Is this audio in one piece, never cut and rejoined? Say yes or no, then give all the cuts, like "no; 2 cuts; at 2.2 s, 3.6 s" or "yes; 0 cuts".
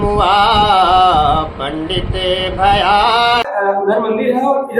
no; 1 cut; at 3.5 s